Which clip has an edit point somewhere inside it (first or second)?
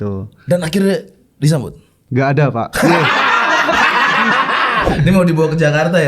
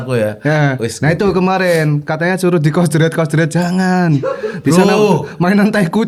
first